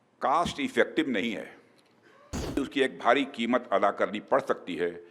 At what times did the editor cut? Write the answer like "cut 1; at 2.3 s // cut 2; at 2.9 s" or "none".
cut 1; at 2.6 s